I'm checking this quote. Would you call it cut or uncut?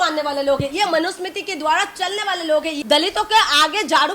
cut